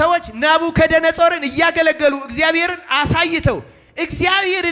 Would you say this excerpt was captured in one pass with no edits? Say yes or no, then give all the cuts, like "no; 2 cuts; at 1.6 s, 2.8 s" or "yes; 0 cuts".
yes; 0 cuts